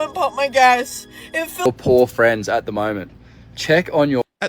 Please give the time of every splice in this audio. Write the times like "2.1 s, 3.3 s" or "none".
1.7 s